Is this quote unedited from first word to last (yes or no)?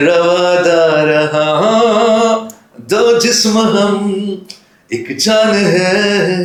yes